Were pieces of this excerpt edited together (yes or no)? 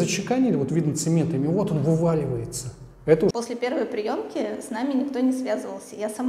yes